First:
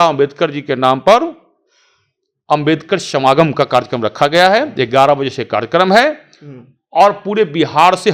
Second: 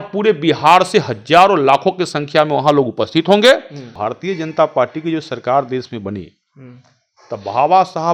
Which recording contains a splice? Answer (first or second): second